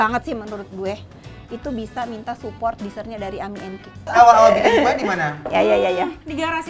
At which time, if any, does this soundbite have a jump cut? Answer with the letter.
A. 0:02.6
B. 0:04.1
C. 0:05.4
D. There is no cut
B